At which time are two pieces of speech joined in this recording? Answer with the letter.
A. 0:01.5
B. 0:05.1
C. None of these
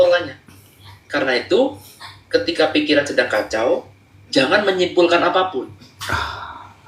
C